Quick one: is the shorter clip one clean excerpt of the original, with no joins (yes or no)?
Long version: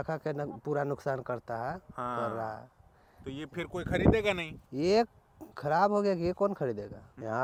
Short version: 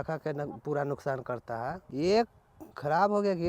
no